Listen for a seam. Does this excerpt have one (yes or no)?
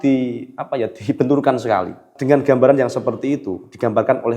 yes